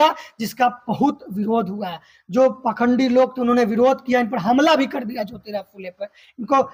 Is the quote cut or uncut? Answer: uncut